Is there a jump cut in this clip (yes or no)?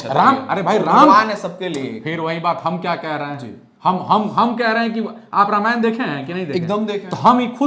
no